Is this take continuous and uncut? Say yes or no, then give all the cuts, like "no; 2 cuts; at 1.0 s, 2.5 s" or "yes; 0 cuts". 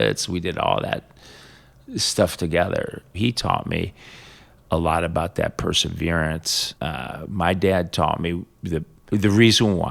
no; 3 cuts; at 3.2 s, 6.6 s, 8.9 s